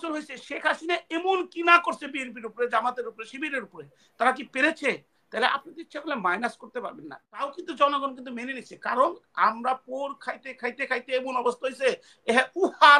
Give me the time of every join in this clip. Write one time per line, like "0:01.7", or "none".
0:07.1